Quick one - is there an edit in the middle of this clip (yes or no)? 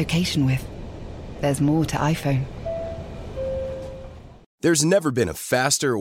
yes